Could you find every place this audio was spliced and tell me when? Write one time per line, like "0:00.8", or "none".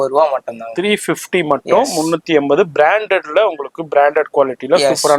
none